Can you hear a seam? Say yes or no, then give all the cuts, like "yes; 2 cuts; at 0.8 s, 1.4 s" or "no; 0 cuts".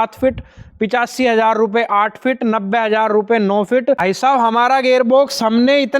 yes; 1 cut; at 4.0 s